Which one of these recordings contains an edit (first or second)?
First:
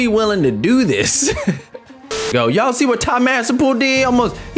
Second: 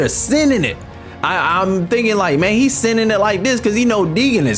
first